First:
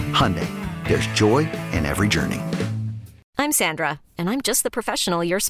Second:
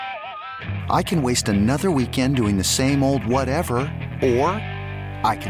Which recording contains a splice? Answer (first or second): first